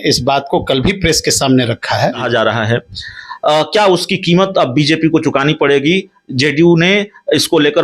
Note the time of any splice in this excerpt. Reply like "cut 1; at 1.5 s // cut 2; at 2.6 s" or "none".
cut 1; at 2.2 s